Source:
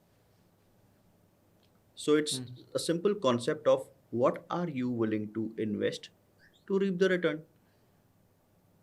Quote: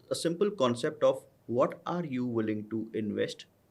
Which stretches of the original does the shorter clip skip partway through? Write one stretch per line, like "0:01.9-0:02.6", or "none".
none